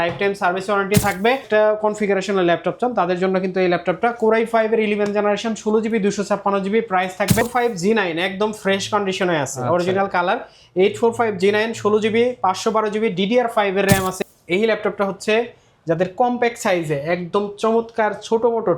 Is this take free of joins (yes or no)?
no